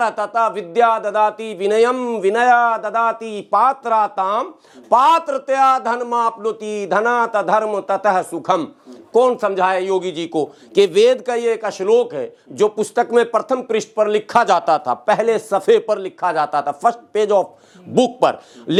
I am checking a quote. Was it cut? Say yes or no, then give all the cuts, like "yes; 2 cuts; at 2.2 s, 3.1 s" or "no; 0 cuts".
no; 0 cuts